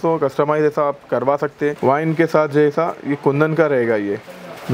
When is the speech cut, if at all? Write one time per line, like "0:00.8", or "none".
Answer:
0:01.8